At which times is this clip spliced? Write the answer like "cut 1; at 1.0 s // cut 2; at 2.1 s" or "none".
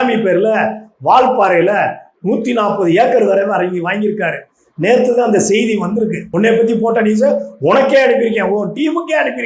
cut 1; at 6.3 s

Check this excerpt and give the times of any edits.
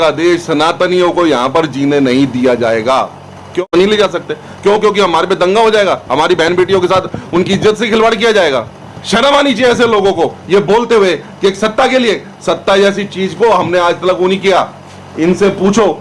cut 1; at 3.6 s

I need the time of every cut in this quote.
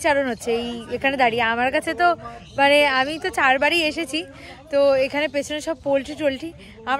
none

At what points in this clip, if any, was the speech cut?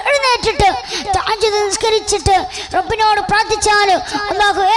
none

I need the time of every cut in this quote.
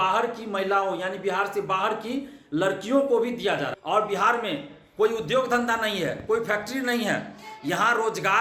cut 1; at 3.8 s

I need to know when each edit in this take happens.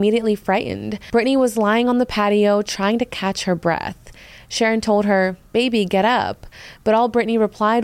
cut 1; at 0.9 s

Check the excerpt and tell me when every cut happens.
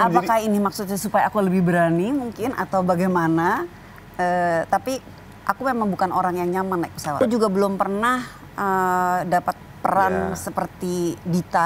cut 1; at 7.2 s

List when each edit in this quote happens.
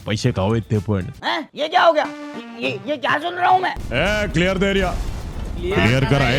cut 1; at 1.2 s // cut 2; at 3.8 s

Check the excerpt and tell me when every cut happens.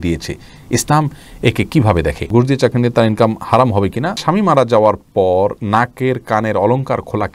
cut 1; at 2.2 s // cut 2; at 4.2 s // cut 3; at 5.6 s

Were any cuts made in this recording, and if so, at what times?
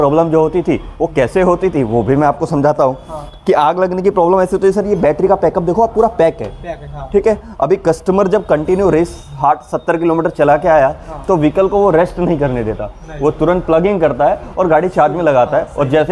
none

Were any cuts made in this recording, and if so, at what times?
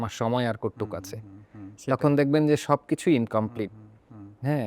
none

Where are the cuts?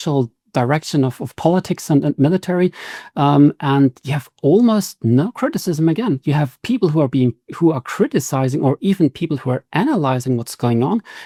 none

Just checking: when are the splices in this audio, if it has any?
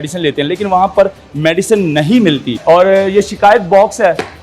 cut 1; at 2.5 s

